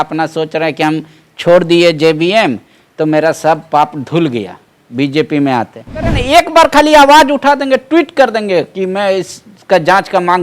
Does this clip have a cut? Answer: yes; 1 cut; at 6.2 s

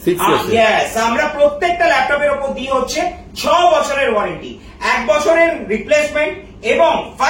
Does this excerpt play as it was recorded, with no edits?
yes; 0 cuts

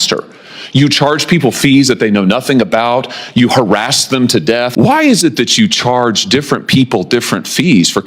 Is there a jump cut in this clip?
yes; 1 cut; at 4.7 s

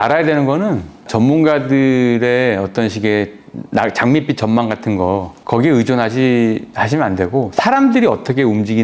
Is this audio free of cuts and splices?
yes; 0 cuts

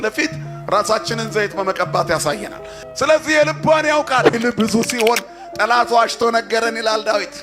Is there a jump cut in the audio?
yes; 1 cut; at 4.4 s

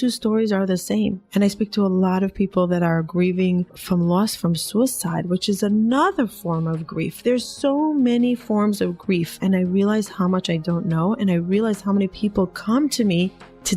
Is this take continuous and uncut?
no; 1 cut; at 1.2 s

